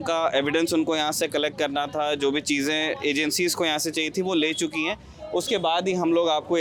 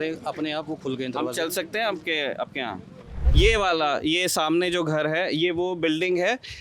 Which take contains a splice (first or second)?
second